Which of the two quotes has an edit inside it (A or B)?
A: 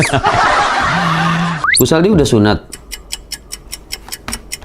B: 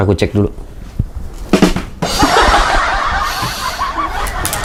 A